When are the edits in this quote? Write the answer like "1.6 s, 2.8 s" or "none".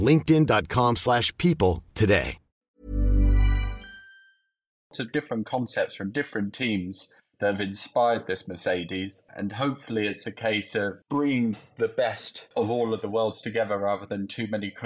4.9 s, 9.3 s, 11.0 s, 12.5 s